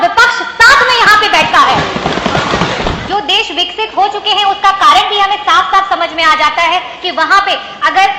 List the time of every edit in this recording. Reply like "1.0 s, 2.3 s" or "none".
3.0 s